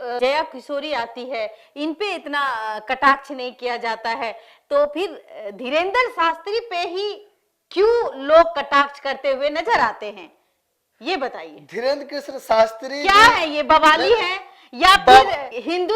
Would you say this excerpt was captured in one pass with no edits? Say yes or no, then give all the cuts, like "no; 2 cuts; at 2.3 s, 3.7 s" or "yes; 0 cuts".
yes; 0 cuts